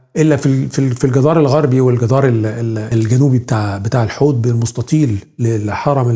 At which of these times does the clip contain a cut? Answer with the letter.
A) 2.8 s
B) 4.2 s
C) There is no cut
A